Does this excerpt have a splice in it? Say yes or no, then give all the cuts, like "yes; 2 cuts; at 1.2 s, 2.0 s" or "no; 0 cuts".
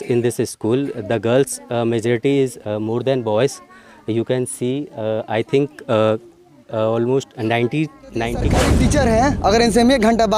yes; 1 cut; at 8.7 s